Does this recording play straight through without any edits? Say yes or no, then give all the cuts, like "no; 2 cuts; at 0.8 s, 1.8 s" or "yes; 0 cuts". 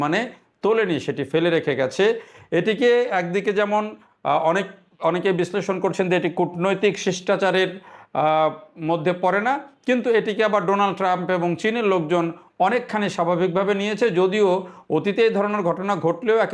yes; 0 cuts